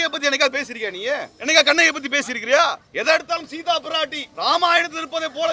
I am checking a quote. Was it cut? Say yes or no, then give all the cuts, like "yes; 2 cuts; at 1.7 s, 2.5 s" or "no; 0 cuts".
yes; 3 cuts; at 1.3 s, 2.9 s, 4.2 s